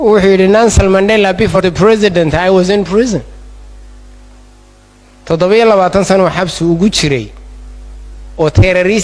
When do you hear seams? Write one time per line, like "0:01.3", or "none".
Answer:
0:01.6